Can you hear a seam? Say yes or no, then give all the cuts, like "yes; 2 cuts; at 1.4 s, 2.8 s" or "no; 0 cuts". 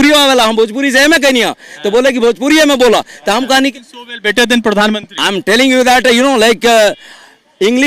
yes; 1 cut; at 3.5 s